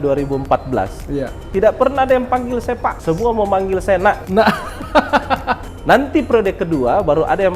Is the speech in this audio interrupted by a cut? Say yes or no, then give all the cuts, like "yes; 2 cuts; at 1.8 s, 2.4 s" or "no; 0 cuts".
yes; 3 cuts; at 2.9 s, 4.2 s, 5.7 s